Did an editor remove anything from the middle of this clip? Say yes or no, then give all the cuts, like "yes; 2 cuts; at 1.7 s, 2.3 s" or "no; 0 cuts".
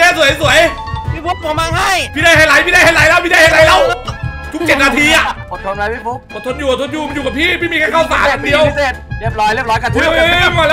yes; 1 cut; at 5.4 s